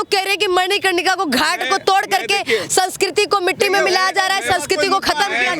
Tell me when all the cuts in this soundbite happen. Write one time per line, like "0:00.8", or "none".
none

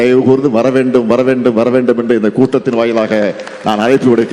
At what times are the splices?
none

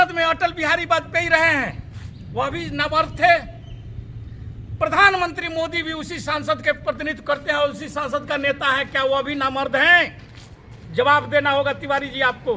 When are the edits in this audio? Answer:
none

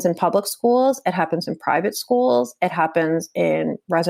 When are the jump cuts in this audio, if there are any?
none

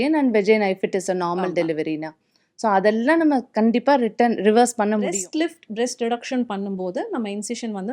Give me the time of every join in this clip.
0:05.1

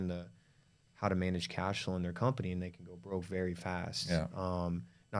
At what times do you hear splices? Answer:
none

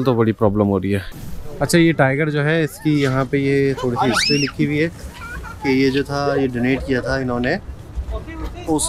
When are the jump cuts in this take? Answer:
0:01.1

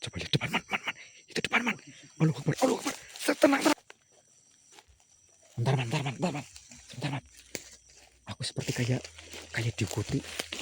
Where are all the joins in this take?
0:03.8

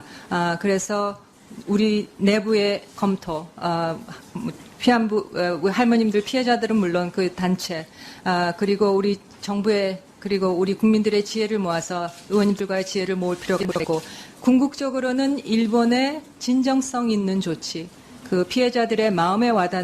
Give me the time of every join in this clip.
0:14.8

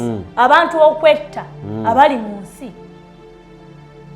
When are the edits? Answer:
0:02.7

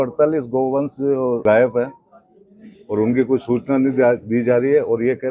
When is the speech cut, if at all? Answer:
0:01.4

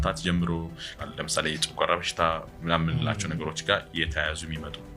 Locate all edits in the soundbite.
0:01.0

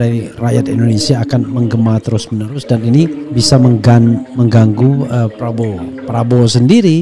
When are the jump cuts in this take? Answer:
0:05.3

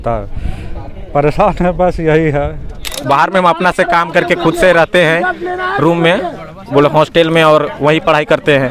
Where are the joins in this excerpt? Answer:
0:02.9

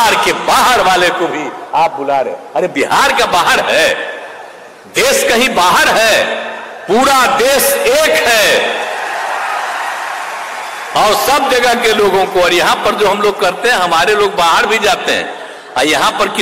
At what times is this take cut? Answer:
none

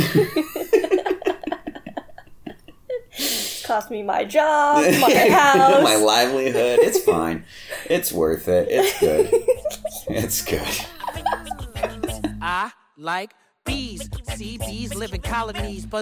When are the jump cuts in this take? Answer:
0:12.3

